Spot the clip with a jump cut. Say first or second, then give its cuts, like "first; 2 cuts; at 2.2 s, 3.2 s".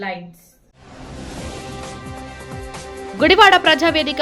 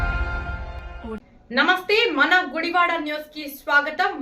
second; 1 cut; at 1.3 s